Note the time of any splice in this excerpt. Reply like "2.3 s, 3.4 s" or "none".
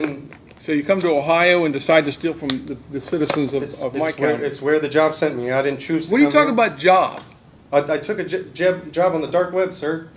none